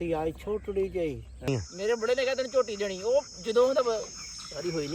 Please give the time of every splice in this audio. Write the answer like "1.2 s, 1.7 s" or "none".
1.5 s